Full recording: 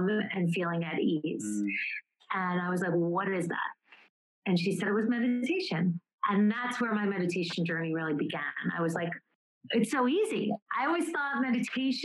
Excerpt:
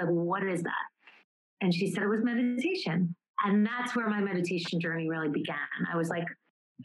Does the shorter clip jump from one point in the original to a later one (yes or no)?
no